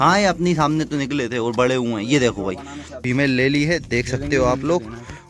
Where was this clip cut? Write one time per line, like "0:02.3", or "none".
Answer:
0:03.0